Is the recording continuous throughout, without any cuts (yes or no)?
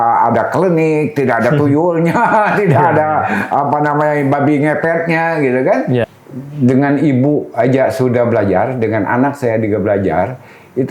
no